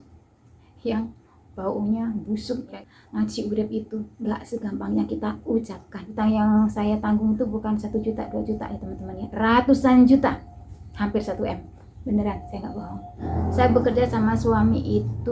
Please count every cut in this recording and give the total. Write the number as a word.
three